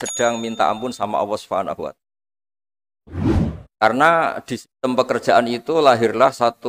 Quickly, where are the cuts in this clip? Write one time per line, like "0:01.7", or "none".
none